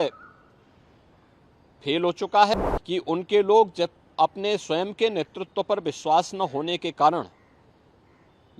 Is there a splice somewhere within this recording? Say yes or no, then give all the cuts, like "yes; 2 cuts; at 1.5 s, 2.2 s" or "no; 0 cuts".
yes; 1 cut; at 2.5 s